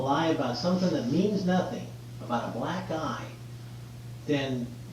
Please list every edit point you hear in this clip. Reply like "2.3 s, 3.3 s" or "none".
none